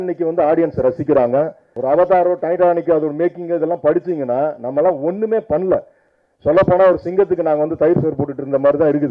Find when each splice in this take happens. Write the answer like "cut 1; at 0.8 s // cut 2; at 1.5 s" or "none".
cut 1; at 1.7 s // cut 2; at 6.0 s